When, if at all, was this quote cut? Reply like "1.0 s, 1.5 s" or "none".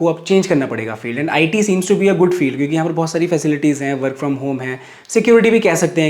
none